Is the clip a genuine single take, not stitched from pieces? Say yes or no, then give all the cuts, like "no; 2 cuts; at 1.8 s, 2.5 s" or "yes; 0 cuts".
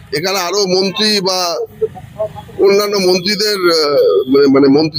yes; 0 cuts